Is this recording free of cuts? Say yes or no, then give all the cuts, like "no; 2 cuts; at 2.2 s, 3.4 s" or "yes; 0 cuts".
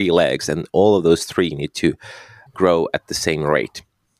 no; 1 cut; at 2.4 s